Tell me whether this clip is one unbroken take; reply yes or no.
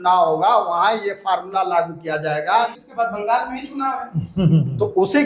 no